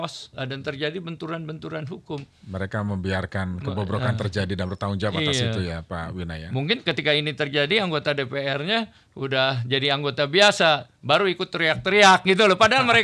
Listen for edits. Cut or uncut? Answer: uncut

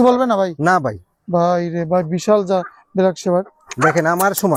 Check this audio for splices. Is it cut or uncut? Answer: uncut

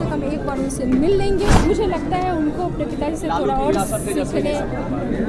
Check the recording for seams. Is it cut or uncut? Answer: cut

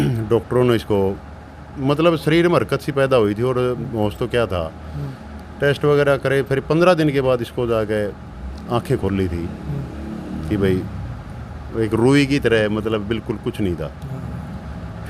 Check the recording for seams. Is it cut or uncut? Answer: uncut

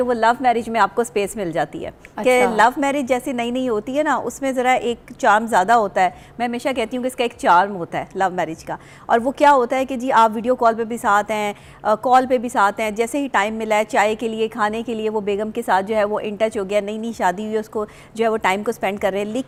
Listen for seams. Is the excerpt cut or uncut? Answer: uncut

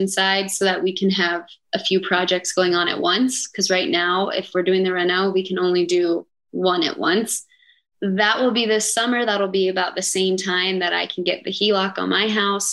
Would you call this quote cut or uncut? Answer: uncut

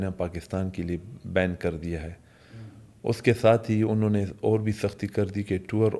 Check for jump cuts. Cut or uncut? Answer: uncut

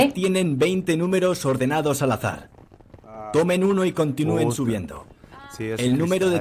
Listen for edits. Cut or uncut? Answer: uncut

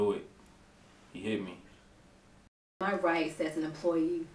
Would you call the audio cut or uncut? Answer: cut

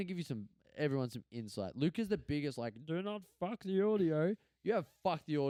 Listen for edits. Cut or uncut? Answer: uncut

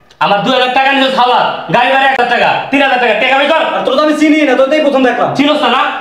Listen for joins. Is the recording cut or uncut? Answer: cut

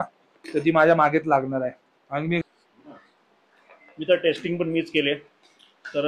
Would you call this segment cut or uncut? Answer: cut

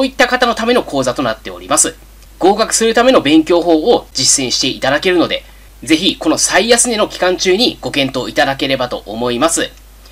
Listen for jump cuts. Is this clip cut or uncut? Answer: cut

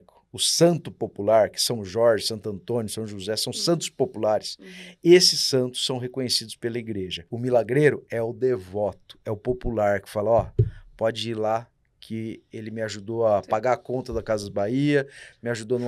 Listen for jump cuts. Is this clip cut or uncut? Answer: cut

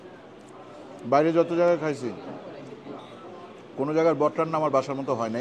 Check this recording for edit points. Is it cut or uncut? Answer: uncut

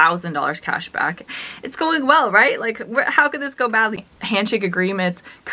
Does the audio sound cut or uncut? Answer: cut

